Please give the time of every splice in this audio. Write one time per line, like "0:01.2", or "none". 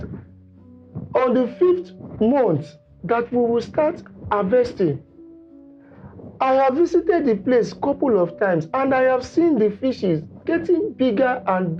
none